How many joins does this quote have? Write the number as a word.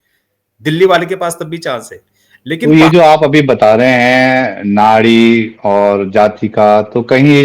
one